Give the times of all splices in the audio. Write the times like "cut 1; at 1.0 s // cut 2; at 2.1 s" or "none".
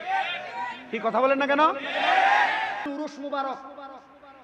cut 1; at 2.9 s